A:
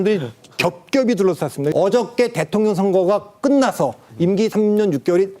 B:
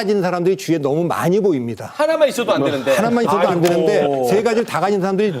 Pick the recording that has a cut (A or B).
A